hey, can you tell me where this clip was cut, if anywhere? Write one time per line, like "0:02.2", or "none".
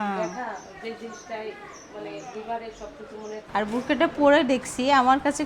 0:03.4

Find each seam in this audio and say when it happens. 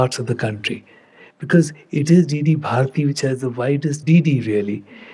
none

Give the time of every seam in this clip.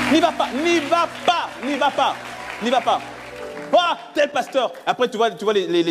none

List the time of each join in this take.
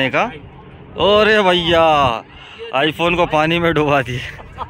none

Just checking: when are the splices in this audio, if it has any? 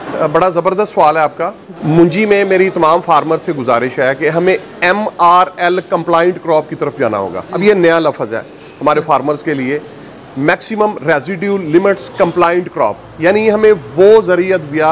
0:01.7
0:07.5

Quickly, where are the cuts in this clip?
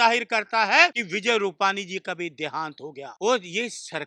0:01.1
0:03.1

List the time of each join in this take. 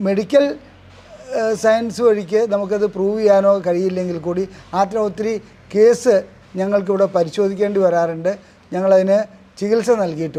none

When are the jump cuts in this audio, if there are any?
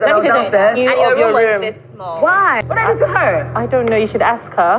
none

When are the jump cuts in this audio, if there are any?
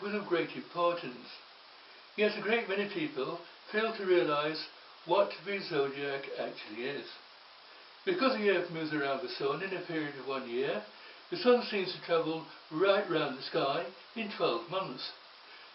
none

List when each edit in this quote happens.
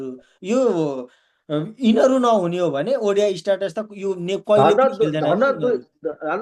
none

